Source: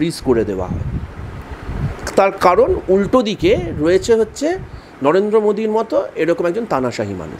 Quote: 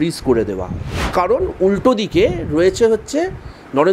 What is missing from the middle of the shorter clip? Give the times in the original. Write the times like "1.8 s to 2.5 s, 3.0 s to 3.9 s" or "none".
1.1 s to 2.4 s